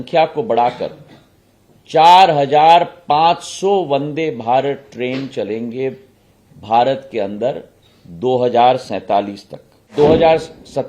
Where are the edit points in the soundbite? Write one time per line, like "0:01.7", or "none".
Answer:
0:09.9